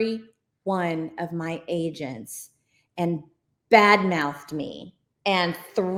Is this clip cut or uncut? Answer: uncut